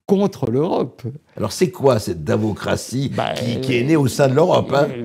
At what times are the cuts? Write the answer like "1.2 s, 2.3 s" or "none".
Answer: 1.3 s